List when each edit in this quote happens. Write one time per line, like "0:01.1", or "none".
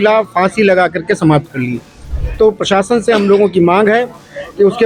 0:02.1